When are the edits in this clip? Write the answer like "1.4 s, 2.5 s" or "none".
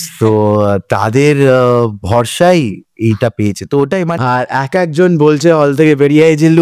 4.1 s